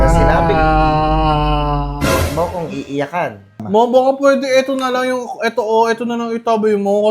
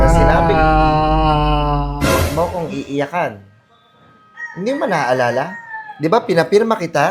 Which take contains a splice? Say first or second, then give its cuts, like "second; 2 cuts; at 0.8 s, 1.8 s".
first; 1 cut; at 3.6 s